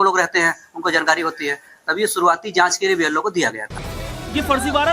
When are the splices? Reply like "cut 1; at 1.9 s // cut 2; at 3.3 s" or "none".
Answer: cut 1; at 3.0 s

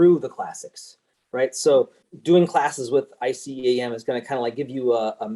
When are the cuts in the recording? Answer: cut 1; at 2.1 s

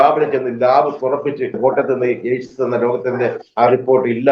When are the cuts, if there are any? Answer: cut 1; at 1.6 s

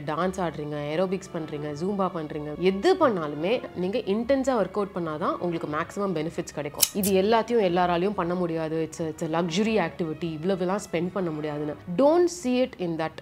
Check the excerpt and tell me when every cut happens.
cut 1; at 2.5 s // cut 2; at 3.7 s // cut 3; at 6.9 s

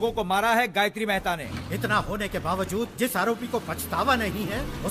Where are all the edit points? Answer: cut 1; at 1.4 s

